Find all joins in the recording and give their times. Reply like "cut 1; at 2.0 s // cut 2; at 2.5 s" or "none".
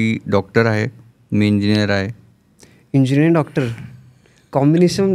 none

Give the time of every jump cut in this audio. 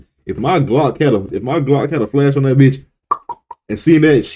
cut 1; at 1.3 s

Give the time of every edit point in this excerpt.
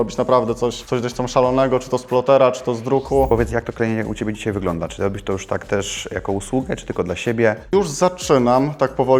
cut 1; at 3.3 s // cut 2; at 7.7 s

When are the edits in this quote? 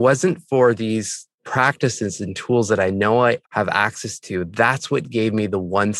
cut 1; at 1.3 s

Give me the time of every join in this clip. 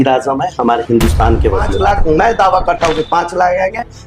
cut 1; at 1.7 s

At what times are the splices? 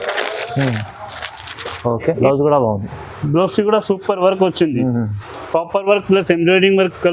cut 1; at 2.2 s

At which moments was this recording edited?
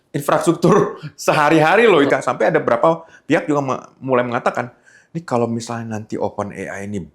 cut 1; at 2.1 s

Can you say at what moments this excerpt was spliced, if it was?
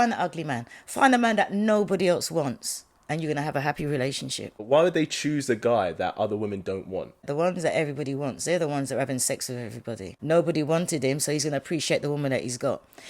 cut 1; at 4.7 s // cut 2; at 7.2 s // cut 3; at 10.1 s

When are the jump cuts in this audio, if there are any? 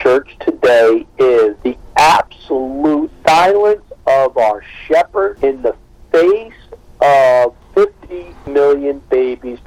none

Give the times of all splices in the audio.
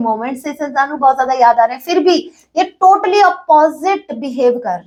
none

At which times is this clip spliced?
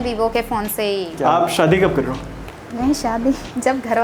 cut 1; at 1.2 s

